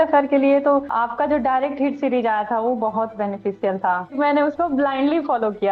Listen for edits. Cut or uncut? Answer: cut